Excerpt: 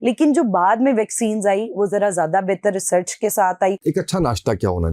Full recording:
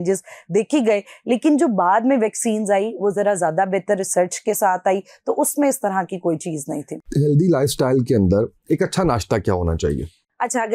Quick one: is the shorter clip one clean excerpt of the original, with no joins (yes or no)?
no